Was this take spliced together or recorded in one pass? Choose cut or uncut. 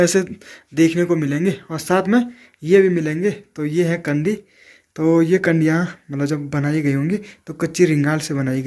uncut